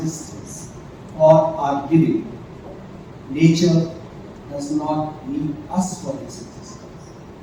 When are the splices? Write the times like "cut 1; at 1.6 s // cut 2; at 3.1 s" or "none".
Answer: none